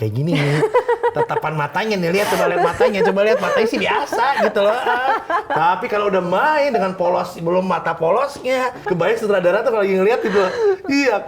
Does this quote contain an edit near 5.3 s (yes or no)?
no